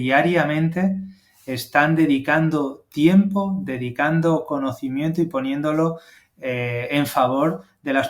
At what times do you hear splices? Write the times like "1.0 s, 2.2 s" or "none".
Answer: none